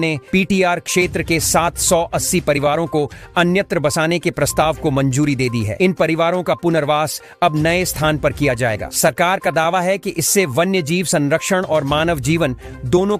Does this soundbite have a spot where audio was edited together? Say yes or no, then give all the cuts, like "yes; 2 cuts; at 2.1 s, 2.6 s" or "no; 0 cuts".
no; 0 cuts